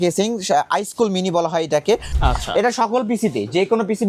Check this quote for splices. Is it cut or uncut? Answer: cut